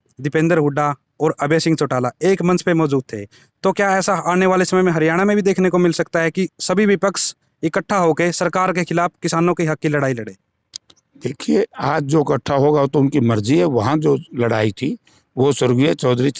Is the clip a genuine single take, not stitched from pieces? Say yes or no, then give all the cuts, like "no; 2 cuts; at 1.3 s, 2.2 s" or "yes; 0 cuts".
yes; 0 cuts